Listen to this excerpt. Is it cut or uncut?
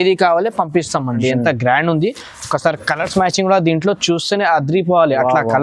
cut